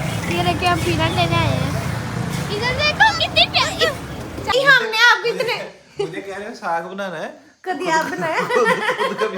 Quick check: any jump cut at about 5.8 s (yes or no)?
no